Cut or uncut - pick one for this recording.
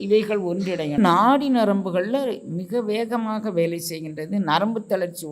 cut